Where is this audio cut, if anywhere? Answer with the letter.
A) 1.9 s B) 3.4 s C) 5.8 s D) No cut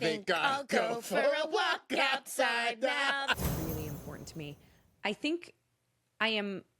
B